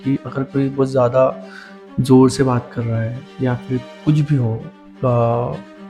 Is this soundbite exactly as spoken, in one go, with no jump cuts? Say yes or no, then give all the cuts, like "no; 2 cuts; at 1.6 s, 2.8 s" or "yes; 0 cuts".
yes; 0 cuts